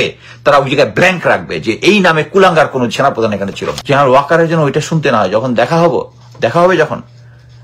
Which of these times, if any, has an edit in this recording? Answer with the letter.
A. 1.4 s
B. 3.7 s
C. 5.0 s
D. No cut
B